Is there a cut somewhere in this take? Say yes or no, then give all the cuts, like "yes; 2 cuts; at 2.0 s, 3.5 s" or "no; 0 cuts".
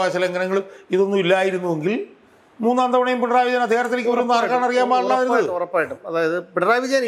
no; 0 cuts